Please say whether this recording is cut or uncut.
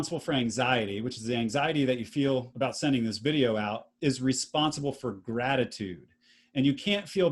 cut